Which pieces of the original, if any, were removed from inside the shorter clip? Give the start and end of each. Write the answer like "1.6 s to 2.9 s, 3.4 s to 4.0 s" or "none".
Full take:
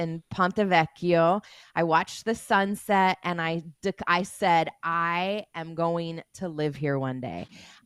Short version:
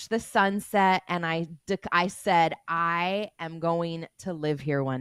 none